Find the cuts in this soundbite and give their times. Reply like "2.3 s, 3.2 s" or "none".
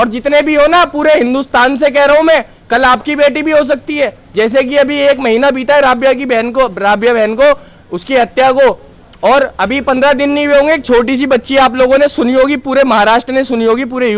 none